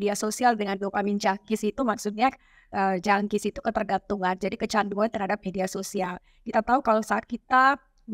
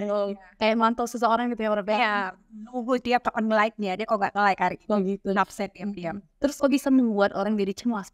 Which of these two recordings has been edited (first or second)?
second